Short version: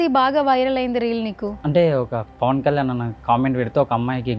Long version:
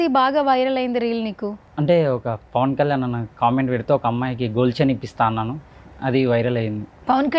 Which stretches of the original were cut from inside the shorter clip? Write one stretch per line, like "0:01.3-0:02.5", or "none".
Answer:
0:01.5-0:01.7